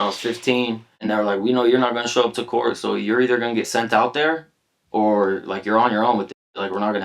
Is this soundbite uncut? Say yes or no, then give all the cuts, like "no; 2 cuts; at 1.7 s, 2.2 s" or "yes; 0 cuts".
no; 1 cut; at 1.1 s